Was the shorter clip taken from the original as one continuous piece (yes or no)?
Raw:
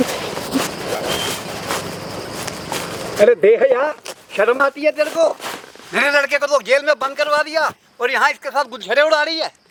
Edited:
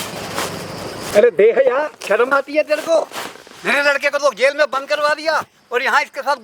no